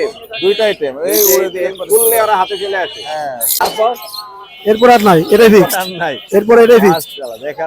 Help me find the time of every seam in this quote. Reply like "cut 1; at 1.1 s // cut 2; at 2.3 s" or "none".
cut 1; at 3.6 s